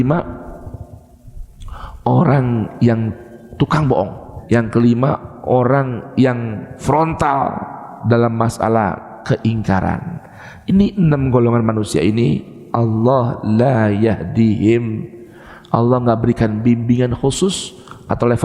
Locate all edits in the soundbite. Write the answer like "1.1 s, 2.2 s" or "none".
4.3 s, 6.8 s